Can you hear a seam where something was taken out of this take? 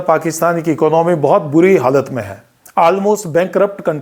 no; 0 cuts

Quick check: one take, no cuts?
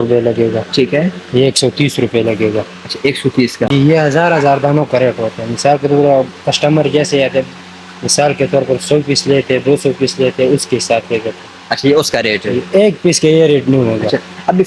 yes; 0 cuts

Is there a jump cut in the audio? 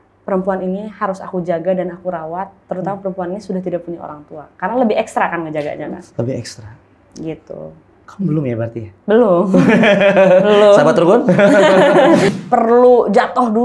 yes; 1 cut; at 12.3 s

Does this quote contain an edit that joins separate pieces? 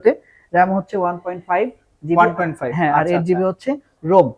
no; 0 cuts

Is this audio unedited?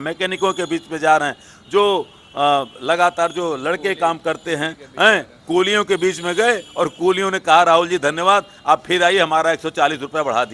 yes; 0 cuts

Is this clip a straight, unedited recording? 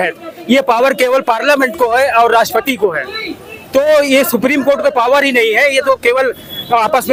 yes; 0 cuts

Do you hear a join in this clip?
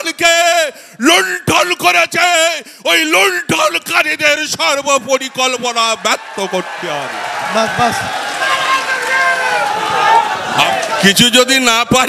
yes; 1 cut; at 10.7 s

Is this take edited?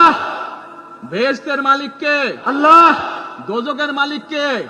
no; 0 cuts

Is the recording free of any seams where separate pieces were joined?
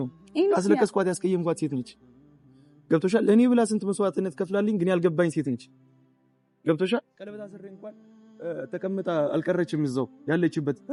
yes; 0 cuts

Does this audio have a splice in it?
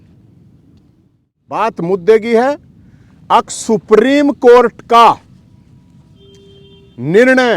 yes; 1 cut; at 1.6 s

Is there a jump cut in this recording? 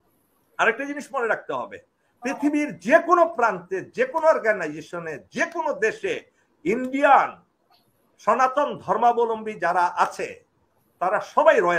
no; 0 cuts

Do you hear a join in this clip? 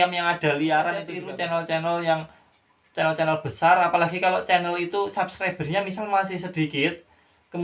yes; 1 cut; at 1.2 s

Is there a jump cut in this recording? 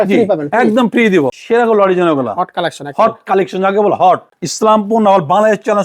yes; 2 cuts; at 1.4 s, 4.4 s

